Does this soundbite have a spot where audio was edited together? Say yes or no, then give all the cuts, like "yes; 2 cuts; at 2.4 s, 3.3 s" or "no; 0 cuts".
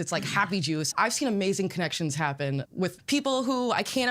yes; 2 cuts; at 0.9 s, 2.7 s